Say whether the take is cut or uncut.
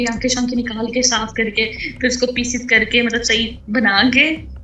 uncut